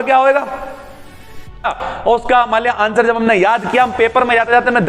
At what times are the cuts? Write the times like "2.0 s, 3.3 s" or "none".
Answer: 1.8 s